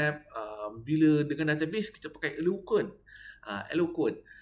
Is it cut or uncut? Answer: uncut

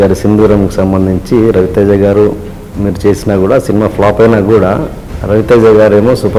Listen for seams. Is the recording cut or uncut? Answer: uncut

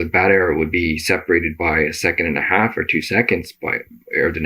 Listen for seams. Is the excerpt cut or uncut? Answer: uncut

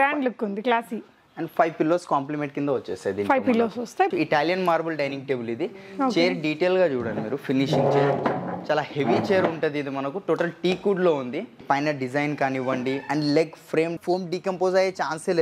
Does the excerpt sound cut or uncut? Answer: cut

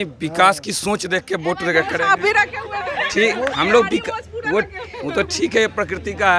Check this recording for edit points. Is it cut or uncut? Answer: uncut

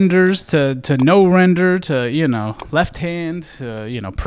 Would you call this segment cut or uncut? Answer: uncut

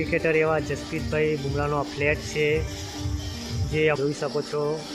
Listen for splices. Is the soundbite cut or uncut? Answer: cut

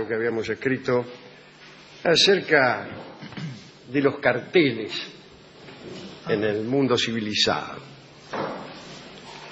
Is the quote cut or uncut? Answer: uncut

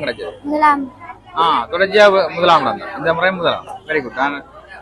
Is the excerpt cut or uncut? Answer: uncut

